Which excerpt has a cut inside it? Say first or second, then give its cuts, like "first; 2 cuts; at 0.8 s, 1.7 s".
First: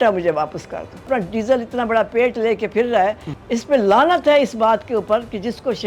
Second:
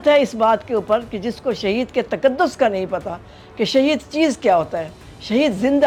first; 2 cuts; at 1.1 s, 3.3 s